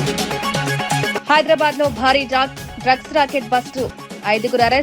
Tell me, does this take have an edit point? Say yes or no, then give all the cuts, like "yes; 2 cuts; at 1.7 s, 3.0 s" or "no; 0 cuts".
yes; 1 cut; at 1.1 s